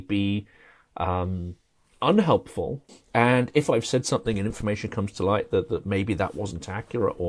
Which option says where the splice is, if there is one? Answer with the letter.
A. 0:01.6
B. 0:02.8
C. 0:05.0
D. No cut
B